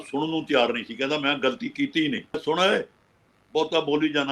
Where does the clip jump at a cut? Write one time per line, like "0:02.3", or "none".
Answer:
0:02.4